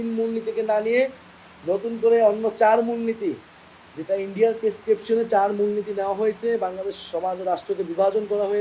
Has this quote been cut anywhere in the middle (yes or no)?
no